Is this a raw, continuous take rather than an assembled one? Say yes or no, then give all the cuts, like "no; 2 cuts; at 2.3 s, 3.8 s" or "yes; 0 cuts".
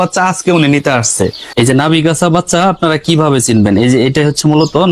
no; 1 cut; at 1.4 s